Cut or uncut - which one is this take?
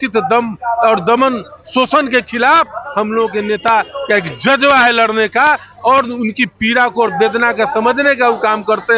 uncut